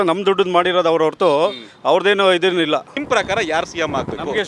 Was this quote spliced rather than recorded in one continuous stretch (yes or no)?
yes